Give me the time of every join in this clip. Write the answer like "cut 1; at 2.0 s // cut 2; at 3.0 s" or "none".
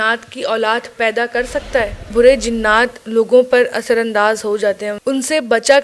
cut 1; at 2.1 s // cut 2; at 4.9 s